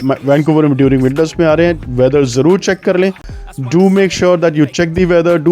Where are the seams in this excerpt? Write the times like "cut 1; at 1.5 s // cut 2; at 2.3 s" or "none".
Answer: cut 1; at 3.3 s